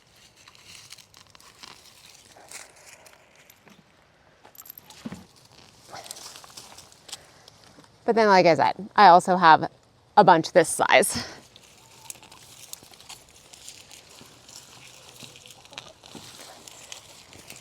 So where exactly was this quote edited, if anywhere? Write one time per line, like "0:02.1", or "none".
0:05.4